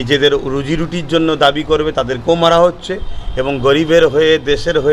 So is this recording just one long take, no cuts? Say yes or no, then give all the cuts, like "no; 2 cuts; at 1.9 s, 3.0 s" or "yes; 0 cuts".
yes; 0 cuts